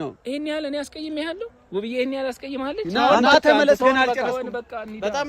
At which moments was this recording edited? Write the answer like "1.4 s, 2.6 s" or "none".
2.8 s